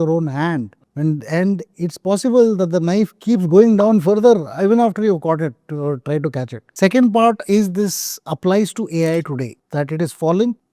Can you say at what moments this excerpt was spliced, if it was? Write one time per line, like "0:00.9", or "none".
0:06.6